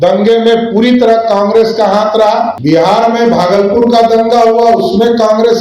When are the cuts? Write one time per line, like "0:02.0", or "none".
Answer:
0:02.6